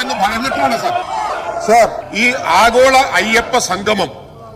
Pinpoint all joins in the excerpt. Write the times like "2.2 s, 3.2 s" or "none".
2.0 s